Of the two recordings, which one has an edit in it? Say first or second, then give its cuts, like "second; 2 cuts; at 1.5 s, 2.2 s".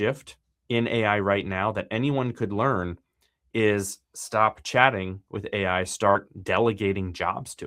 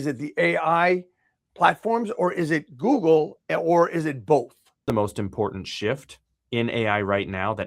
second; 1 cut; at 4.9 s